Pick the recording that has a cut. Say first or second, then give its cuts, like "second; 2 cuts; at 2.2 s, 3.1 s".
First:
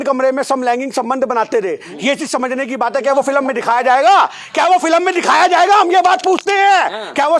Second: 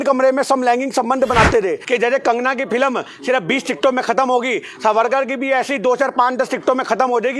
second; 1 cut; at 1.8 s